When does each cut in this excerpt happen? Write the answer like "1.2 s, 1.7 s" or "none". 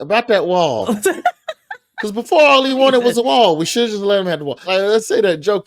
4.6 s